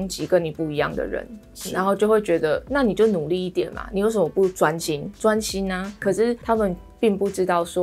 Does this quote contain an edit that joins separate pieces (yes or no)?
no